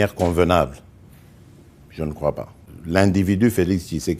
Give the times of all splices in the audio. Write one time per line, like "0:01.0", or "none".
0:02.7